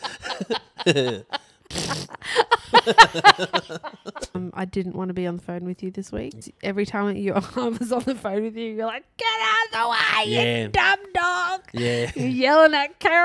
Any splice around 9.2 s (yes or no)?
no